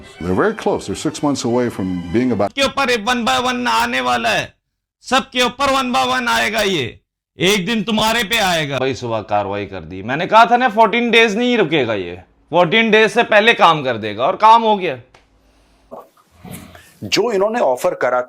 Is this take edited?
yes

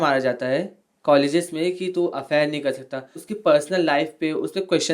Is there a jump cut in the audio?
yes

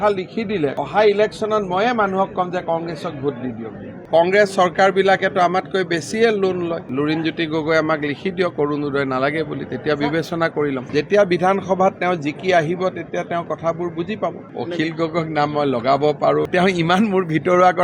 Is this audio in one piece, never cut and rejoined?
no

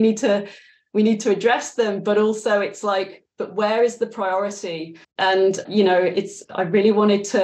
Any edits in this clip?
yes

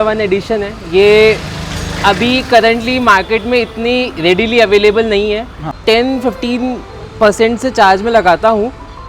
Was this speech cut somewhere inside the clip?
yes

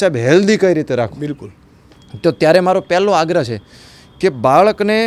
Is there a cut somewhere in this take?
no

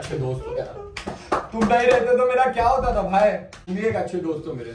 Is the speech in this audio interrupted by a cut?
yes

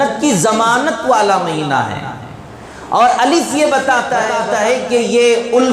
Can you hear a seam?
yes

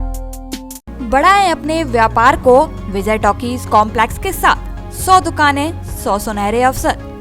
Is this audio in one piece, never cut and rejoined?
yes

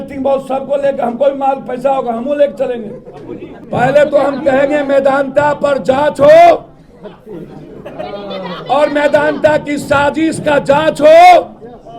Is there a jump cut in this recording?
yes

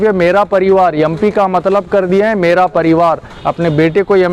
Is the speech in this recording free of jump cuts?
yes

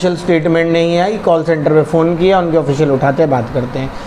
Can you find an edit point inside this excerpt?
no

